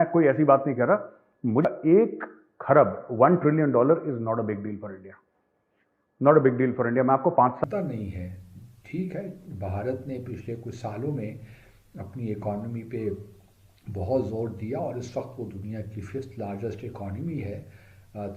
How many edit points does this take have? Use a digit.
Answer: 2